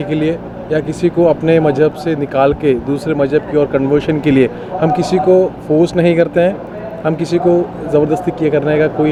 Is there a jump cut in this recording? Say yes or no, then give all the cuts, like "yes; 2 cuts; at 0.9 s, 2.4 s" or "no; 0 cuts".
no; 0 cuts